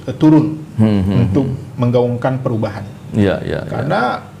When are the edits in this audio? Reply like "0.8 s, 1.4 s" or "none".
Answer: none